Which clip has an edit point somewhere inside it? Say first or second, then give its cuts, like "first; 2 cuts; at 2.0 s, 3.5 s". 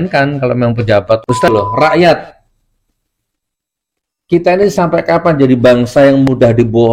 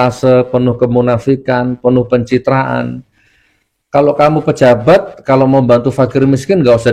first; 1 cut; at 1.5 s